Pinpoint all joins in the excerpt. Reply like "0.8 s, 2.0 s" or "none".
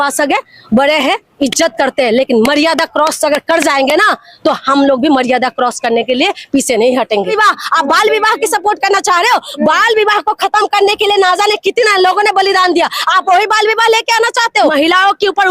7.3 s, 14.7 s